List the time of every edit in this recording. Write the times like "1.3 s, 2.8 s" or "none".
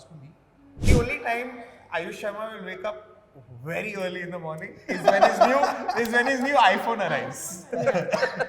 0.9 s

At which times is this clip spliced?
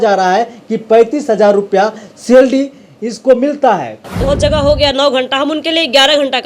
3.9 s

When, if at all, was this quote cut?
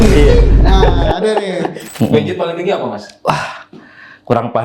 1.8 s

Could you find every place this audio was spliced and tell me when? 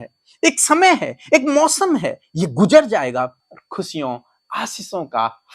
3.4 s

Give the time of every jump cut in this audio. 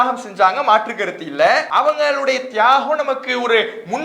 1.7 s

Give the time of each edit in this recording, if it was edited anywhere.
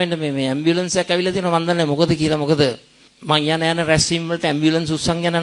none

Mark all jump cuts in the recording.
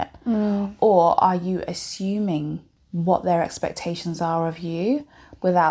2.7 s

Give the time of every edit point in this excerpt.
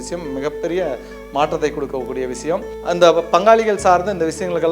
2.7 s

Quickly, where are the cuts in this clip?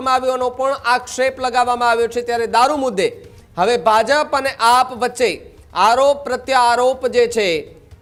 none

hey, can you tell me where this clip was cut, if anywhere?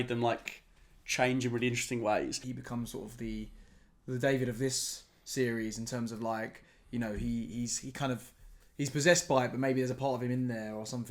2.4 s

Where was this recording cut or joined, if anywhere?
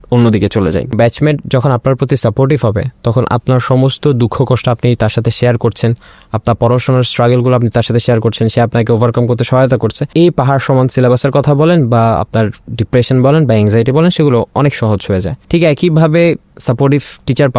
1.0 s, 10.0 s, 15.4 s

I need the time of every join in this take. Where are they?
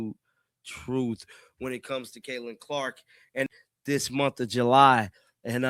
3.5 s

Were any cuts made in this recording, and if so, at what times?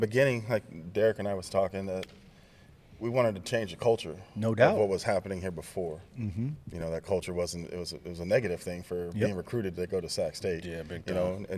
6.6 s

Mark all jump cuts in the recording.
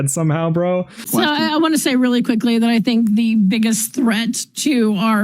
1.0 s

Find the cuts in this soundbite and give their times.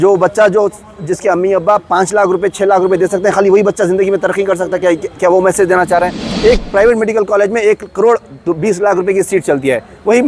6.2 s

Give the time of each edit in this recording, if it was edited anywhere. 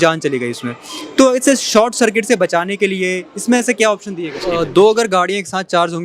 4.4 s

